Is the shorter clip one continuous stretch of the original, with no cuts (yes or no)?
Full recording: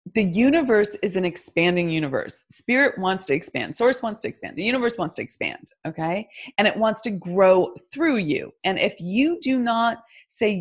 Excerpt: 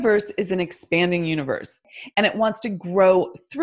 no